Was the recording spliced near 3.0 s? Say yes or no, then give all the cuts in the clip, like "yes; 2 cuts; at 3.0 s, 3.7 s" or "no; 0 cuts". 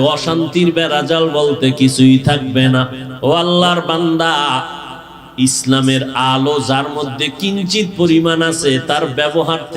yes; 1 cut; at 3.0 s